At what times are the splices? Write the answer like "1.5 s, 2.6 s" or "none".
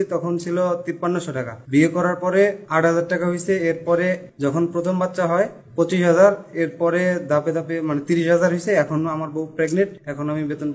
1.1 s, 2.6 s, 4.3 s, 5.6 s, 9.7 s